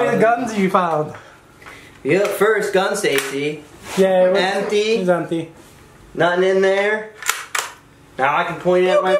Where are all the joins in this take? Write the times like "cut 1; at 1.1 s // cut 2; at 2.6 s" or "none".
none